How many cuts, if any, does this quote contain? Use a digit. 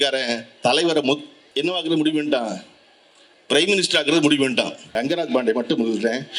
2